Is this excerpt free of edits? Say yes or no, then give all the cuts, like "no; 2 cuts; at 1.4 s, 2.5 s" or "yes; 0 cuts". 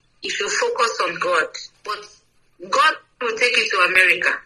no; 1 cut; at 1.7 s